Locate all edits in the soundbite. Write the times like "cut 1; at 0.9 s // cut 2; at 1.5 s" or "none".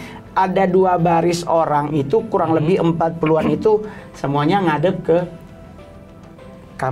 none